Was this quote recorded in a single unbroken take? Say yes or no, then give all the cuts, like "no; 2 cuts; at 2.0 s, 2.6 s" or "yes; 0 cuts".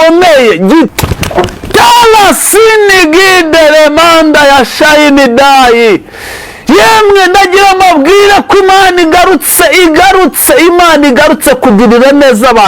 no; 1 cut; at 0.9 s